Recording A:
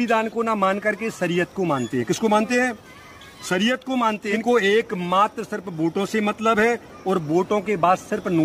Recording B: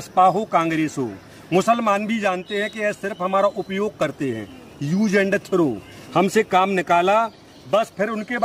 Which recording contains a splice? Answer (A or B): A